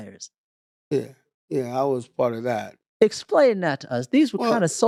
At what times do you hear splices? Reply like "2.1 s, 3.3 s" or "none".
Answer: none